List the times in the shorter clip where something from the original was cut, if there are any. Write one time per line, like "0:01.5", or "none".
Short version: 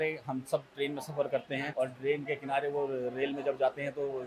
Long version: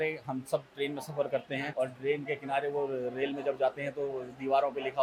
none

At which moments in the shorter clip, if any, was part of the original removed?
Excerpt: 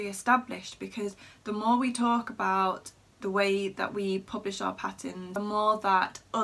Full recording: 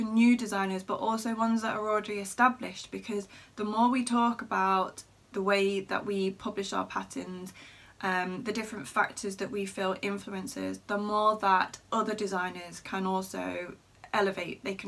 0:05.4

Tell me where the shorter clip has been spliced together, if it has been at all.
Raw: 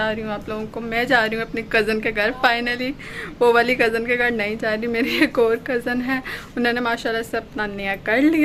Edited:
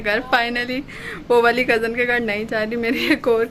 none

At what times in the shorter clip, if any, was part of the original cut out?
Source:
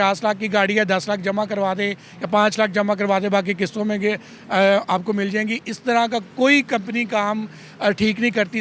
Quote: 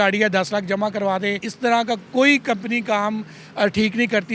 0:01.5

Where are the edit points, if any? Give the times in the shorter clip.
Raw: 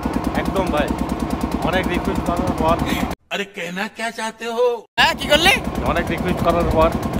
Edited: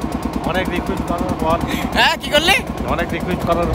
0:01.9

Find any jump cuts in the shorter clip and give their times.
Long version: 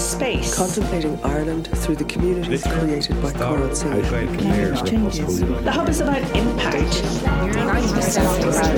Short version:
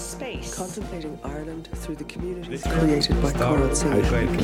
none

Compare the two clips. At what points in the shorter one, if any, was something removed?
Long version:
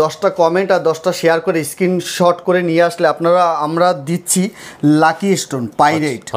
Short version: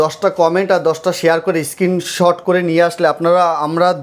none

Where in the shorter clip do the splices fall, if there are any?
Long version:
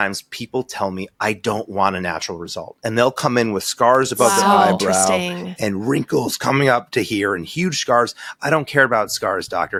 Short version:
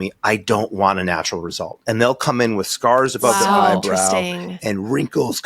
none

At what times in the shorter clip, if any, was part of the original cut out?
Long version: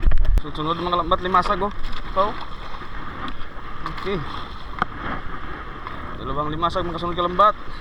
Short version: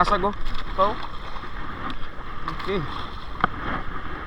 none

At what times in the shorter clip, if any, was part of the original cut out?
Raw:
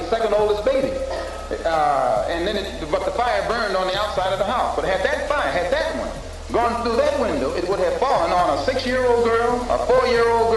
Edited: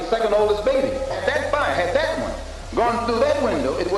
0:01.2

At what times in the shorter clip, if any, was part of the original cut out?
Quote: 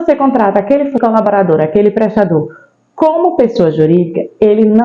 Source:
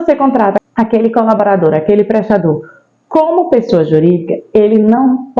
0:01.0

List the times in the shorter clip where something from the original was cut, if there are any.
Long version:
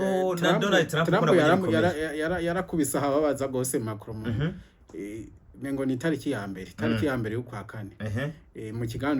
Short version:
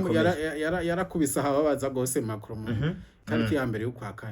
0:03.1

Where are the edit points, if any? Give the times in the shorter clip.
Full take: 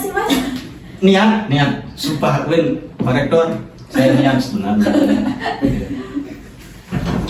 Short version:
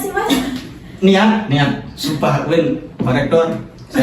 none

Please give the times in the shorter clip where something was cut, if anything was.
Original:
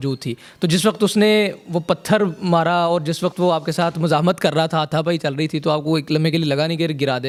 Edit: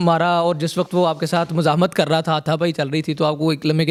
none

